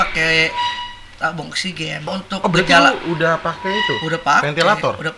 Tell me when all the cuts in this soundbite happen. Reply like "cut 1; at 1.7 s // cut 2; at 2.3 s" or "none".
cut 1; at 2.1 s